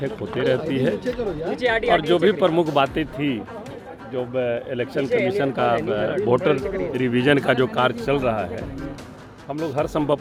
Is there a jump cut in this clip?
no; 0 cuts

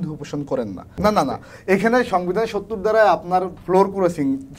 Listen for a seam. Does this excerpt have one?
yes; 1 cut; at 0.9 s

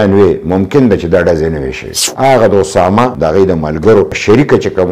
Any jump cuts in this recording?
yes; 2 cuts; at 2.0 s, 3.1 s

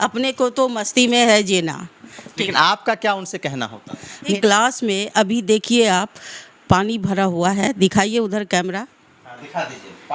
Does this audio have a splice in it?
yes; 1 cut; at 4.3 s

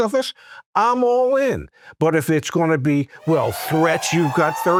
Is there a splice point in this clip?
no; 0 cuts

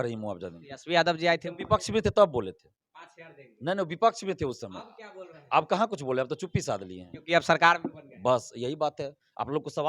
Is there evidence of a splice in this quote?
no; 0 cuts

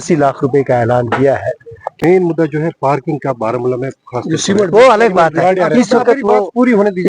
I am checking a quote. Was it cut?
yes; 1 cut; at 2.1 s

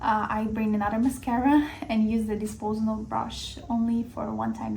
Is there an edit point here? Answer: no; 0 cuts

